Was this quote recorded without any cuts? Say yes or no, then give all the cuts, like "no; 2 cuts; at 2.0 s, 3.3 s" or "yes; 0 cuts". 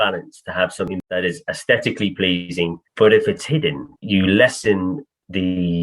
no; 3 cuts; at 0.9 s, 2.8 s, 3.9 s